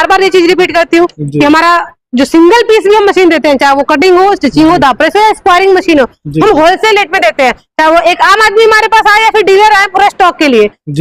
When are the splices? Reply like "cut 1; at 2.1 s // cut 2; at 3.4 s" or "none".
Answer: none